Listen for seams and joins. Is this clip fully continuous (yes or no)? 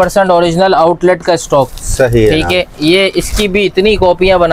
yes